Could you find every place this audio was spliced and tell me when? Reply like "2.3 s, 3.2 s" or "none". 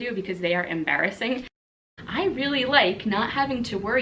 1.8 s